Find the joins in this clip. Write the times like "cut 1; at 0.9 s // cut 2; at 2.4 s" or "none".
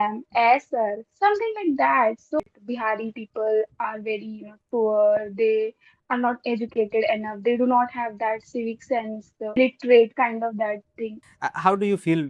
cut 1; at 2.4 s // cut 2; at 9.6 s // cut 3; at 11.2 s